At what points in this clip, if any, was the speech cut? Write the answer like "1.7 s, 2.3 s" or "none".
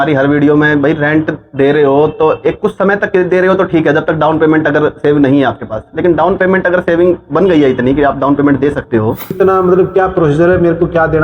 9.3 s